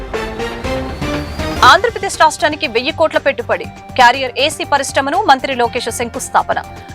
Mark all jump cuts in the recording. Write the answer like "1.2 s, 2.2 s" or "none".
1.5 s